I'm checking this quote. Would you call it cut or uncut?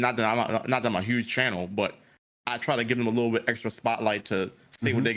uncut